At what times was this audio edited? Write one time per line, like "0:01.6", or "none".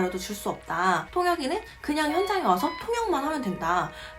0:01.1